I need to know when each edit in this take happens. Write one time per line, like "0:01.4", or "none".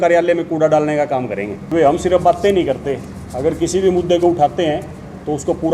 0:01.6